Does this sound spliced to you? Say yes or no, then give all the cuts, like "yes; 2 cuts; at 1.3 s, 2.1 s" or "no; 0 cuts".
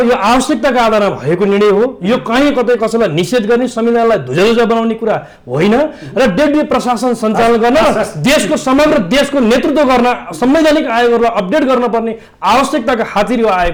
no; 0 cuts